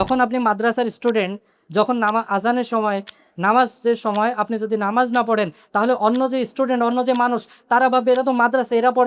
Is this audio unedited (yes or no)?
yes